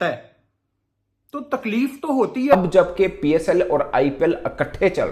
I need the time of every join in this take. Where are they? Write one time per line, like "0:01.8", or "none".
0:02.5